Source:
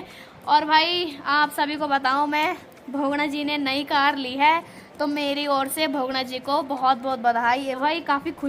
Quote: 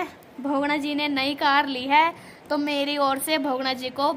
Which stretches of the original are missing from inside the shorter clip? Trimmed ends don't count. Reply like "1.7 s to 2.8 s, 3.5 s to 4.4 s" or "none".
none